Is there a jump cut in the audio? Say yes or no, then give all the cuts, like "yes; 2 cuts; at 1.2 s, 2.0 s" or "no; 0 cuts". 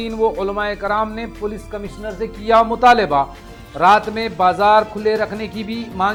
no; 0 cuts